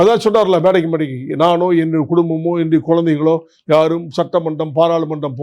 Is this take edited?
no; 0 cuts

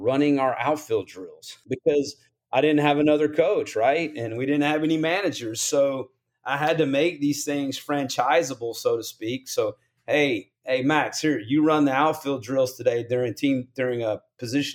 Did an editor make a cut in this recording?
yes; 1 cut; at 1.5 s

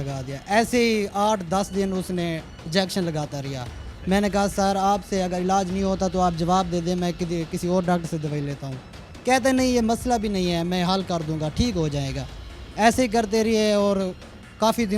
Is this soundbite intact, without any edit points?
yes; 0 cuts

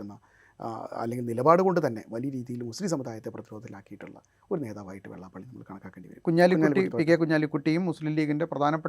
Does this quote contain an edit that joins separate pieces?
yes; 1 cut; at 6.1 s

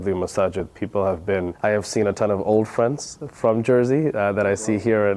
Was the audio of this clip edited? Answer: no; 0 cuts

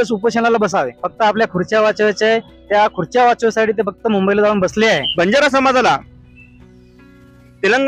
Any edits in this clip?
yes; 2 cuts; at 1.0 s, 5.1 s

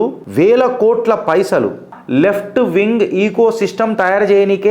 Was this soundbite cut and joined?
no; 0 cuts

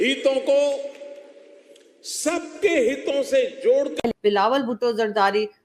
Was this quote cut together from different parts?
no; 0 cuts

